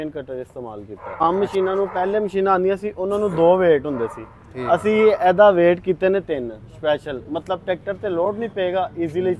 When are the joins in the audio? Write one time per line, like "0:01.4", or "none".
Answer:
0:01.2